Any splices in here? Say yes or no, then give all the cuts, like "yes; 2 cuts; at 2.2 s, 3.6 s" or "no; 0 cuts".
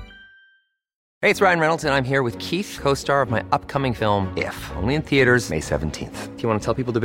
yes; 1 cut; at 1.0 s